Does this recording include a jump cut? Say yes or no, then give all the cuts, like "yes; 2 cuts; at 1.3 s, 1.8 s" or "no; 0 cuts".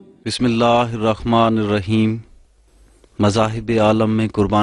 no; 0 cuts